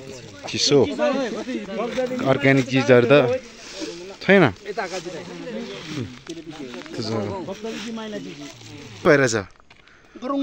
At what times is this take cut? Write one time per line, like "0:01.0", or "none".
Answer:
0:09.1